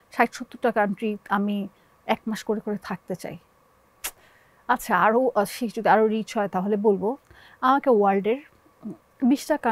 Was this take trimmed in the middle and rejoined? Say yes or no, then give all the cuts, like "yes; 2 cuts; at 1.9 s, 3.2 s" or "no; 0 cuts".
no; 0 cuts